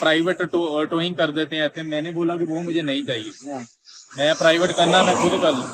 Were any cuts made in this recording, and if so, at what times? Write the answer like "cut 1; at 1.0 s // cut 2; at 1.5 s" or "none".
none